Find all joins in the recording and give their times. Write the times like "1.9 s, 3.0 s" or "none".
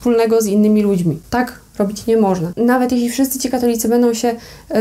1.2 s, 2.5 s

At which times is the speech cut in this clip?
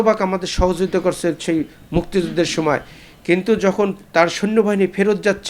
none

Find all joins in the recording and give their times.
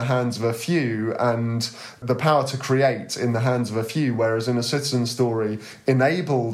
2.0 s

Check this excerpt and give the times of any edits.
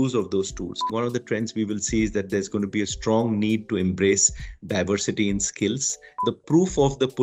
0.9 s, 6.2 s

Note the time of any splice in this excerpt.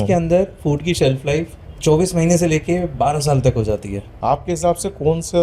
1.6 s, 4.0 s

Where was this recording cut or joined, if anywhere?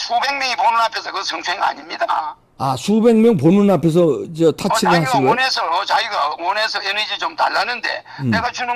none

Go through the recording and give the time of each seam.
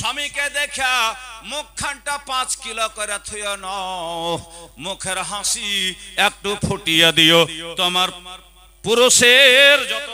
none

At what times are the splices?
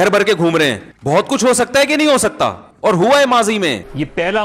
none

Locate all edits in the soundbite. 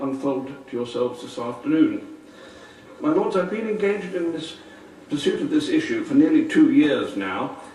none

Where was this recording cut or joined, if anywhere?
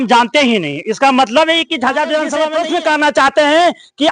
2.5 s

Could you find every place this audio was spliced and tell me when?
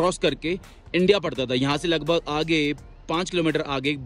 none

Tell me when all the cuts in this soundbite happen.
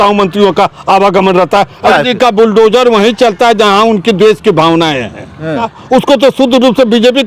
1.9 s, 5.8 s

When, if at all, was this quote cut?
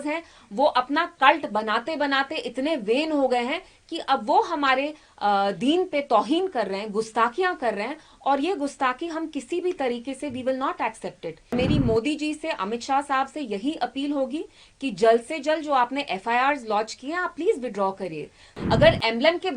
11.5 s, 18.5 s

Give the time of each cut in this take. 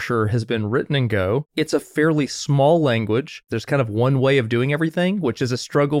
1.5 s, 3.5 s

